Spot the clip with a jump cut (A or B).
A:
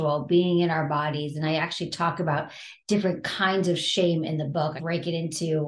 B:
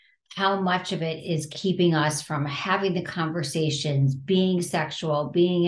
A